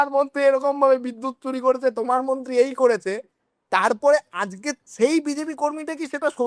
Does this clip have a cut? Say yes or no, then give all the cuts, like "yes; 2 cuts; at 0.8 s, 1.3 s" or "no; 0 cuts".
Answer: no; 0 cuts